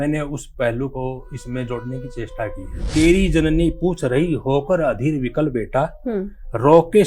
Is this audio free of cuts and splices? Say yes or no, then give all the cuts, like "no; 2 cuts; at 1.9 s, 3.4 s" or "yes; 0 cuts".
no; 1 cut; at 2.9 s